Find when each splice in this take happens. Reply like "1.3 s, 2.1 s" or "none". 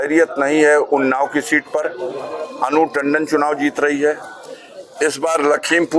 none